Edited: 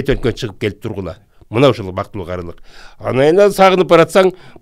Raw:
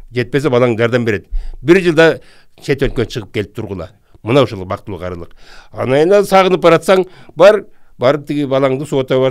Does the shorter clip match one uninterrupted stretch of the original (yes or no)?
yes